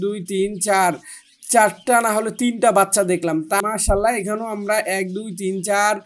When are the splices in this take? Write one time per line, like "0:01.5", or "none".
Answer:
0:03.6